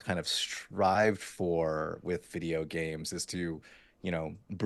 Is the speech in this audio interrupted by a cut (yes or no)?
no